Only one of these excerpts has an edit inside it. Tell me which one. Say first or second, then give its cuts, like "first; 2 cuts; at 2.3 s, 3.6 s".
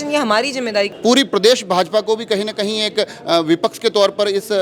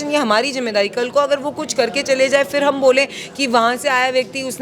first; 1 cut; at 0.9 s